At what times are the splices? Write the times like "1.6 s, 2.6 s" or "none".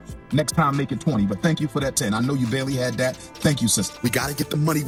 none